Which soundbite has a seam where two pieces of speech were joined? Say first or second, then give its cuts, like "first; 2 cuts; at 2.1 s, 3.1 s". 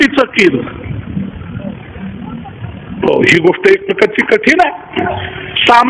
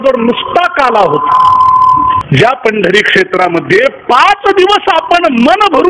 second; 1 cut; at 2.2 s